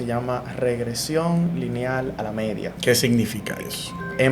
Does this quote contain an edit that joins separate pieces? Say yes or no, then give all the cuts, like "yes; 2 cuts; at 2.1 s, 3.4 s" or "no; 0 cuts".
yes; 1 cut; at 2.7 s